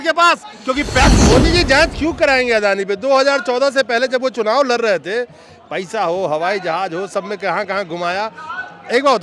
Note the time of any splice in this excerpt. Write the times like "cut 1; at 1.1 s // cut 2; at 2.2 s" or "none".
cut 1; at 1.1 s